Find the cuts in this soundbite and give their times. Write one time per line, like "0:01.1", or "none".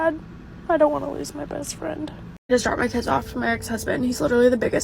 0:02.3